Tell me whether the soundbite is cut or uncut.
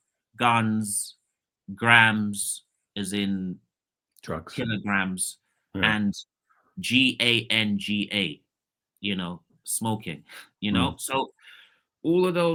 uncut